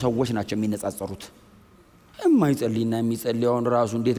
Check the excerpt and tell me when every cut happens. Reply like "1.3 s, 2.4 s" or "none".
none